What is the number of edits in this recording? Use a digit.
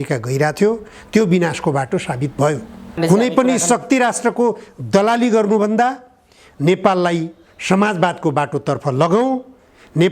1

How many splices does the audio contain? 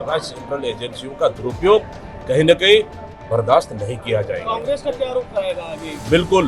0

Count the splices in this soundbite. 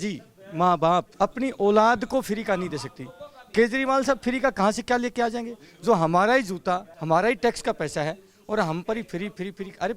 2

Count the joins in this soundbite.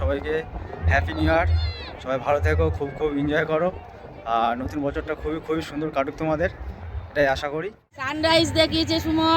1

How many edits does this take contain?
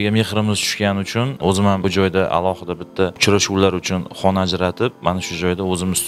2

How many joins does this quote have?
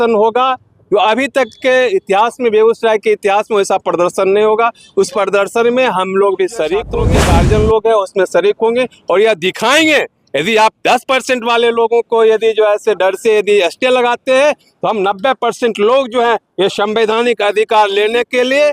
1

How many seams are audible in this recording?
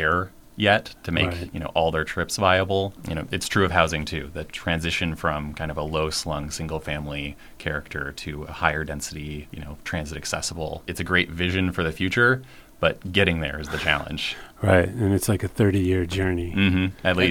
3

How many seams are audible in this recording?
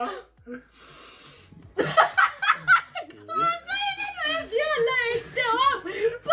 0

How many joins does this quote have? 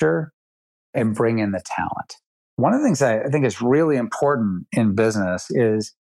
2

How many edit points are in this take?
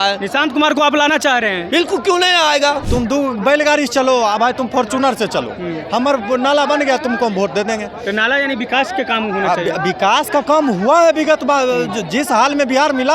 1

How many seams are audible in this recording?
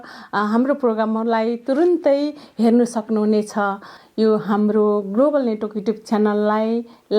1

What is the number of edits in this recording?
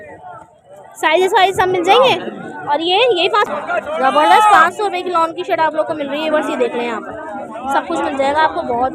1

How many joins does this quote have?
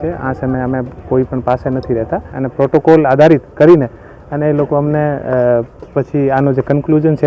1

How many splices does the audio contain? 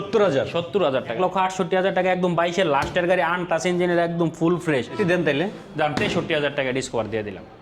2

